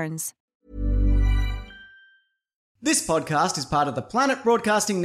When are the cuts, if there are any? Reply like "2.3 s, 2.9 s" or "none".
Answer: 2.7 s